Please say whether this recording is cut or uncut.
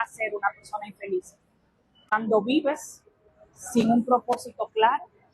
cut